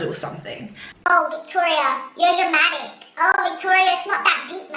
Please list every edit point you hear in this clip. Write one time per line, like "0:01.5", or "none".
0:01.1